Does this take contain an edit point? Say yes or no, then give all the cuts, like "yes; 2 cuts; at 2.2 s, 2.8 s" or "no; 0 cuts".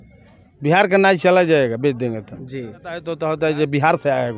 yes; 1 cut; at 3.1 s